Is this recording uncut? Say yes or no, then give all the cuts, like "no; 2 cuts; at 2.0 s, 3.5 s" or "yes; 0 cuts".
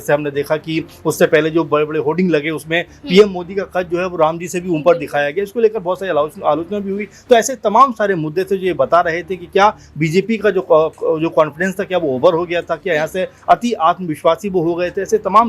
yes; 0 cuts